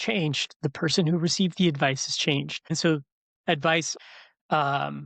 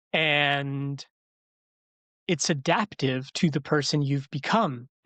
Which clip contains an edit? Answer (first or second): first